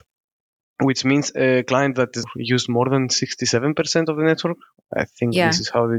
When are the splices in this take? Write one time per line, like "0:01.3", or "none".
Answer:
0:02.3